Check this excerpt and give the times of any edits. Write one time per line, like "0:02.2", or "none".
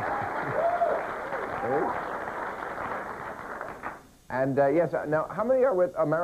0:02.4